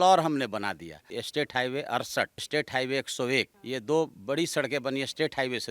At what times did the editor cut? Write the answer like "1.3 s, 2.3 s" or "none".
1.0 s, 2.5 s, 3.6 s